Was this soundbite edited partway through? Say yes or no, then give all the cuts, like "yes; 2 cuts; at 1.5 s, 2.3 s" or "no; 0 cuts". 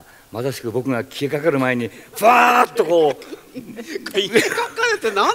no; 0 cuts